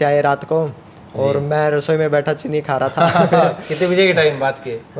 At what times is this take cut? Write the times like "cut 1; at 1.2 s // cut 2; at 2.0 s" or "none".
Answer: none